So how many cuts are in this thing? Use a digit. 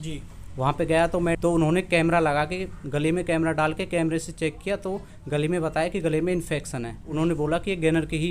2